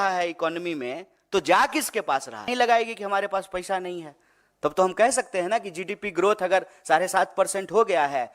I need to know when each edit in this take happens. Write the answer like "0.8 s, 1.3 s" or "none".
2.5 s

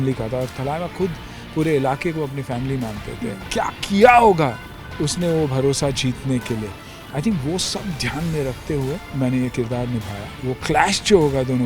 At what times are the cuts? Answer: 3.4 s, 9.1 s, 10.4 s

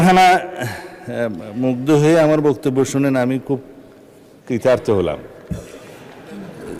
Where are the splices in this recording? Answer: none

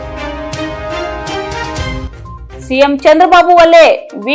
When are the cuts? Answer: 1.9 s

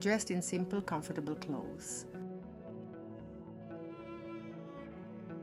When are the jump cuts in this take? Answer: none

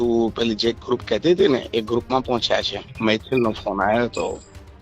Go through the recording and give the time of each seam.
2.9 s

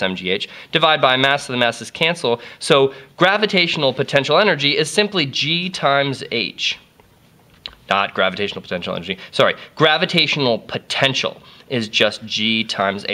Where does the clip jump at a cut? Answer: 2.8 s

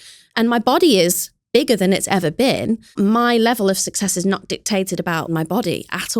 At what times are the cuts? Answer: 3.0 s, 5.3 s

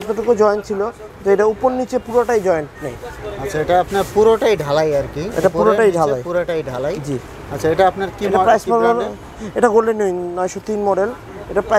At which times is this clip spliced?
none

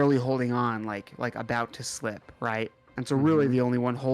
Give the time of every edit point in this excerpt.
2.8 s

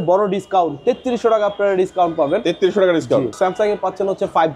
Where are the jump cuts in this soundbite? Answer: 3.3 s

